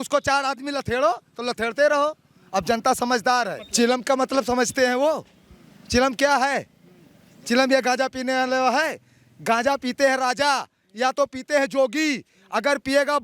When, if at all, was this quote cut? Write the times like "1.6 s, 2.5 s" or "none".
3.6 s